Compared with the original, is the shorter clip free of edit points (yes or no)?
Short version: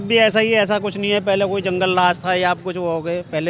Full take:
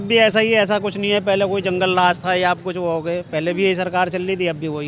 yes